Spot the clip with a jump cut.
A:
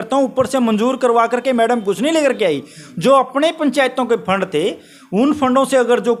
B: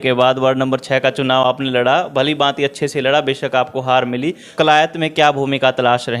B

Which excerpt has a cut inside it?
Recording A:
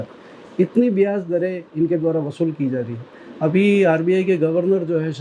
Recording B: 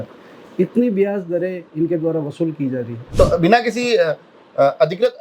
B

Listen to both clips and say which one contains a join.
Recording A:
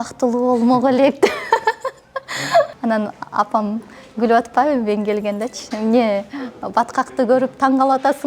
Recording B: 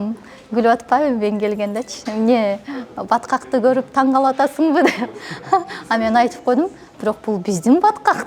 A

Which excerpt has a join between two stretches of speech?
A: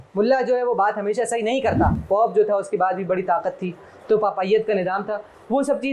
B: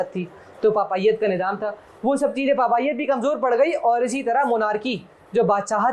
A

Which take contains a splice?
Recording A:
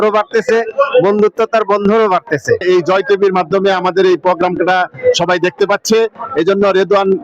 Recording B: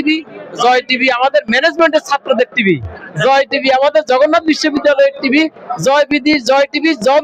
A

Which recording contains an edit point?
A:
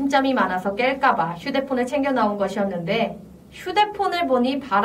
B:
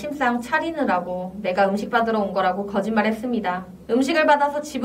B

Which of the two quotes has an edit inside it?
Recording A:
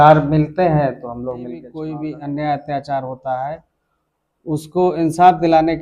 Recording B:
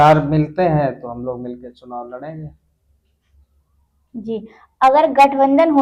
A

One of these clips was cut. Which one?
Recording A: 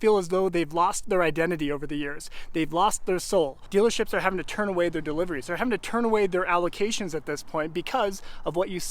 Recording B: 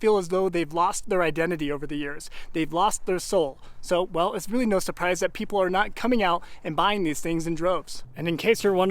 A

